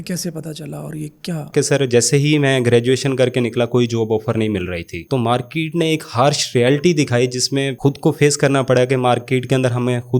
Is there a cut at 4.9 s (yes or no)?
yes